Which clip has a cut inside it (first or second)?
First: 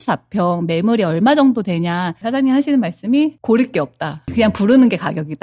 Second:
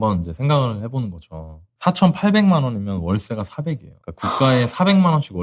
first